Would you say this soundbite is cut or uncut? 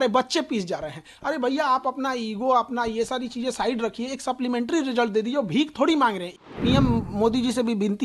cut